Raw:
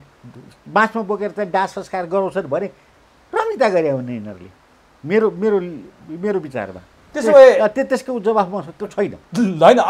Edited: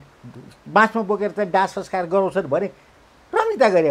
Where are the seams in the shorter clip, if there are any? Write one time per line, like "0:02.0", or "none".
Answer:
none